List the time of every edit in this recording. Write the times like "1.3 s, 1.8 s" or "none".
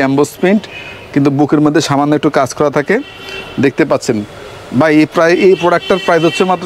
none